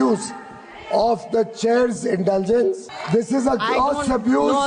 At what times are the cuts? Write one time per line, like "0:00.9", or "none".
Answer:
0:02.9